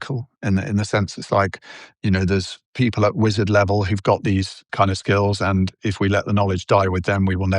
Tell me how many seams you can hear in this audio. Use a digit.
3